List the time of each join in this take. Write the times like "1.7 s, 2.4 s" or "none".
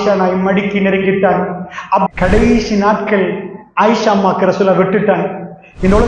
2.1 s